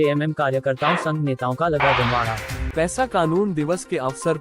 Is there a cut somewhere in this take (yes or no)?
yes